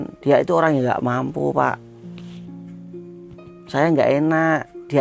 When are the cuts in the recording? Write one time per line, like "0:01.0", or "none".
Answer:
0:01.8
0:03.3